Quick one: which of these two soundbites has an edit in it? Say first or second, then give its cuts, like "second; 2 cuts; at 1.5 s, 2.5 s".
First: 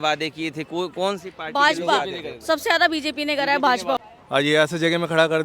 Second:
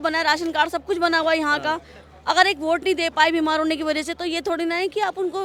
first; 1 cut; at 4.0 s